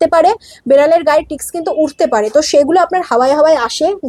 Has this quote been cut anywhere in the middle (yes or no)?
no